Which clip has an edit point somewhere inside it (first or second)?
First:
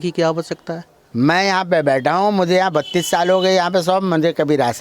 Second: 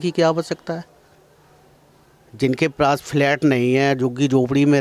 first